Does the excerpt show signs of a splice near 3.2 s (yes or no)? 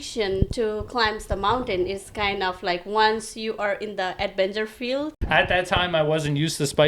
no